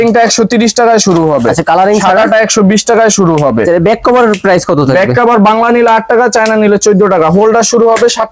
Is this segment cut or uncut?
uncut